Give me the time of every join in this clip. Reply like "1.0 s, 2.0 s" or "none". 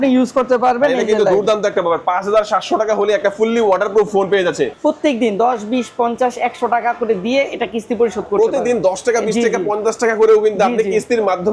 4.7 s